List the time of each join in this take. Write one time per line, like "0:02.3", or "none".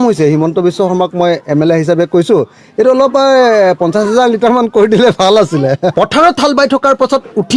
0:05.9